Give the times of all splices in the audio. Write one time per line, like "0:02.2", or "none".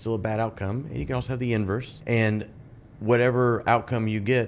0:01.9

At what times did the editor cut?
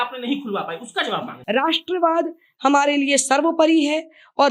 0:01.3

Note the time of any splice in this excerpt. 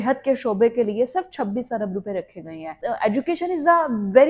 0:02.7

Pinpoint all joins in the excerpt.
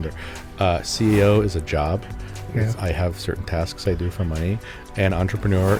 none

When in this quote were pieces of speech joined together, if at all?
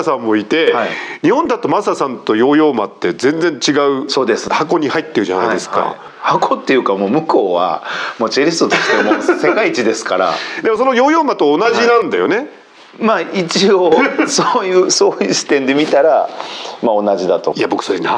none

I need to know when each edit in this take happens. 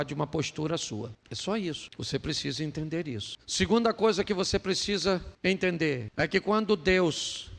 0:01.2
0:01.9
0:03.4
0:05.3
0:06.1

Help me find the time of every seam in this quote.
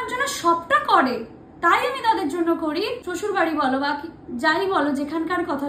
0:03.0

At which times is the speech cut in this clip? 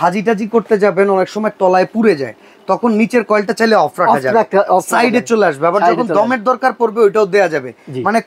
none

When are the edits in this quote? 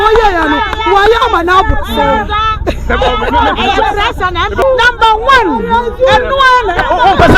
0:04.6

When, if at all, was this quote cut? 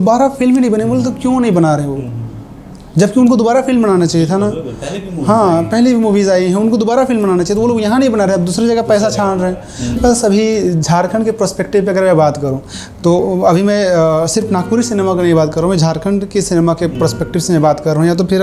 0:10.0

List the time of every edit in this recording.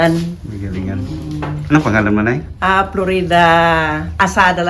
none

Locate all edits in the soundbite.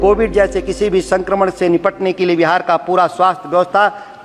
none

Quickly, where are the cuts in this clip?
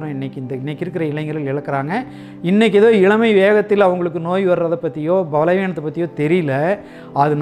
none

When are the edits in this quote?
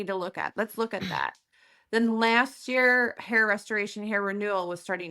0:03.1

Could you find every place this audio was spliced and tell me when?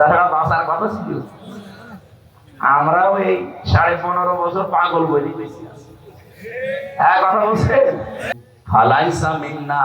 0:08.2

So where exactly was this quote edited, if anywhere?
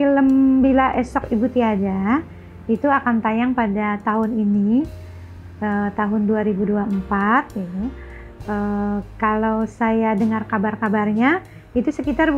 none

